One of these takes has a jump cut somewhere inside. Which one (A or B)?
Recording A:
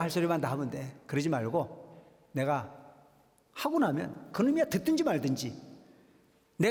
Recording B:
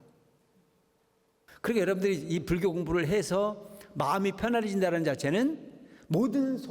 B